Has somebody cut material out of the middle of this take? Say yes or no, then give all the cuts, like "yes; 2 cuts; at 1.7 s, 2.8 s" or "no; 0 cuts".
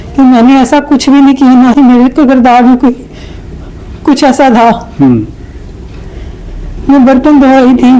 no; 0 cuts